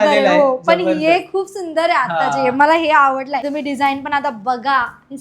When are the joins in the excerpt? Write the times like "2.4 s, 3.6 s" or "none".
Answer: 3.4 s